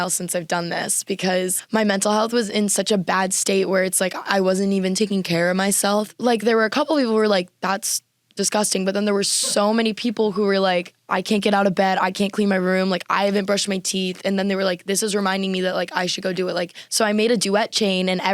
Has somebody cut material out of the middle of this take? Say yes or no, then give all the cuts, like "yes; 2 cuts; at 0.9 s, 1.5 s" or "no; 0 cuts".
yes; 4 cuts; at 1.6 s, 6.1 s, 11.0 s, 16.8 s